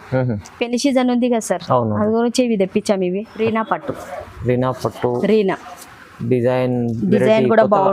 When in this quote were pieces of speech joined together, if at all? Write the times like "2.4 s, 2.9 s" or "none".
3.3 s